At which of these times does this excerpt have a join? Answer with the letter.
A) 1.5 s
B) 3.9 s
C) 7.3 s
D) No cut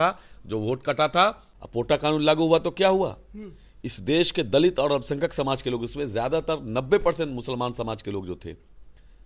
A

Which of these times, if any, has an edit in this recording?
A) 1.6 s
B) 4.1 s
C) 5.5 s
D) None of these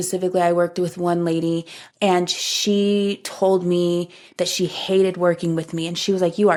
D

